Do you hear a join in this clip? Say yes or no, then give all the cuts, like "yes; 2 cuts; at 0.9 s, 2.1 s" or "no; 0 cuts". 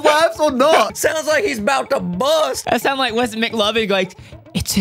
yes; 2 cuts; at 0.9 s, 2.6 s